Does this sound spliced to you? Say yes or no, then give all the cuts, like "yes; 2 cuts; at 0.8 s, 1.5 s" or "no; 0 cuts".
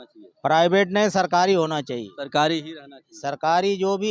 no; 0 cuts